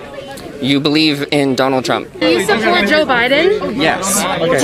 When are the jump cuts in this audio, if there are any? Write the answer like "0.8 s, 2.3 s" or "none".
2.2 s